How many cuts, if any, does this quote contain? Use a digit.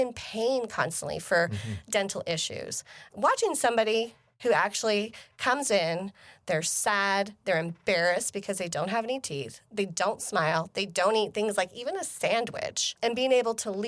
1